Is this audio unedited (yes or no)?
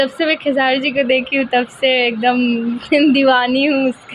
yes